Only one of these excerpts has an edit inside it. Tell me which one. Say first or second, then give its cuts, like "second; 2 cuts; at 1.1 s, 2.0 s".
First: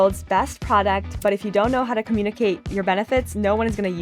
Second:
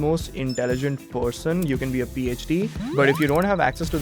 second; 1 cut; at 2.8 s